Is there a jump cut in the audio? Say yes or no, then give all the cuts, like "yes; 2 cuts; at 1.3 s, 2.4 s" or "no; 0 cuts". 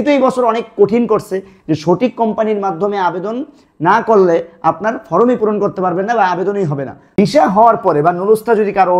yes; 1 cut; at 7.1 s